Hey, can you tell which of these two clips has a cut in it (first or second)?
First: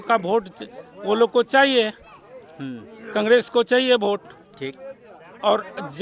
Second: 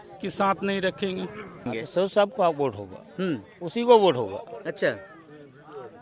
second